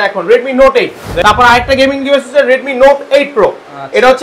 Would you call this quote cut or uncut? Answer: cut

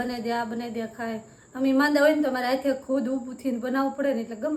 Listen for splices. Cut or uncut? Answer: uncut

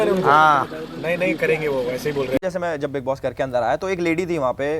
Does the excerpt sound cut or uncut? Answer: cut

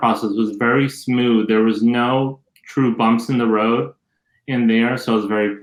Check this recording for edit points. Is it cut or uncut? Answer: uncut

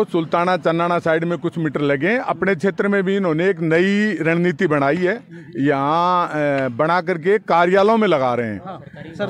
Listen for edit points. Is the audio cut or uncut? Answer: uncut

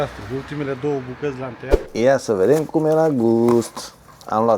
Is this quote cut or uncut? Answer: cut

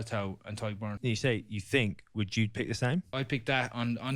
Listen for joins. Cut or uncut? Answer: cut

